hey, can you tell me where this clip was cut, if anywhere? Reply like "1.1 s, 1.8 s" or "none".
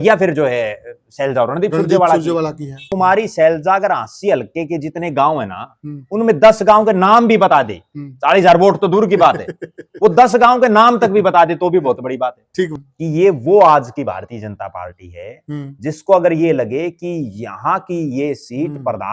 2.8 s, 12.7 s